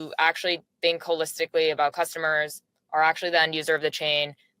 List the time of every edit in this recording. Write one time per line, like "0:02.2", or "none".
none